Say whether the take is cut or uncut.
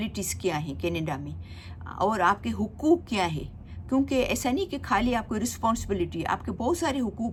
uncut